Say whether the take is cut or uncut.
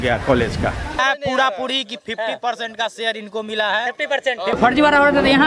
cut